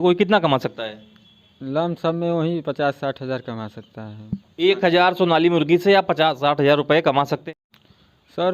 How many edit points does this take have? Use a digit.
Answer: 1